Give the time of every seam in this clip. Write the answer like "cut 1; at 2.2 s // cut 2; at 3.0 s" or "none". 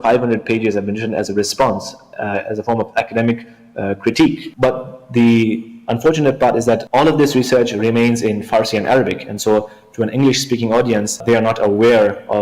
cut 1; at 4.5 s // cut 2; at 6.9 s // cut 3; at 11.2 s